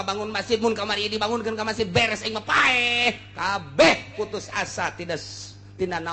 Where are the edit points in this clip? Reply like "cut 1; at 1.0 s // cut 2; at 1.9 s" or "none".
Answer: none